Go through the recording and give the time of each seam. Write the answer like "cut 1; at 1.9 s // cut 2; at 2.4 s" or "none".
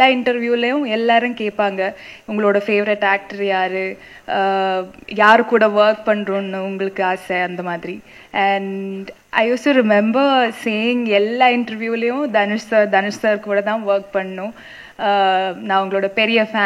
none